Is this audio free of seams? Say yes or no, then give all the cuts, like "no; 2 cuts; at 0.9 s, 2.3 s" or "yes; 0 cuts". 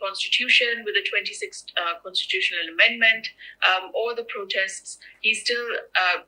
yes; 0 cuts